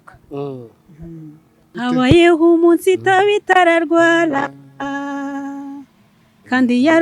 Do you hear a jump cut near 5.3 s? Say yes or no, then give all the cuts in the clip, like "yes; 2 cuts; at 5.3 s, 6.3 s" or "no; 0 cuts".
no; 1 cut; at 1.8 s